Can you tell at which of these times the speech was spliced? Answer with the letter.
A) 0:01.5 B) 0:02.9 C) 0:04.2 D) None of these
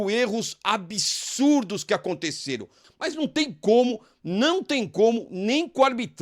B